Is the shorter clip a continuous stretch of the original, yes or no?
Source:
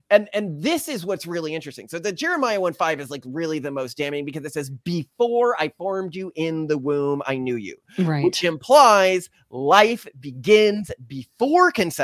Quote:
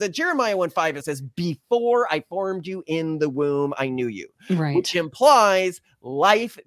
no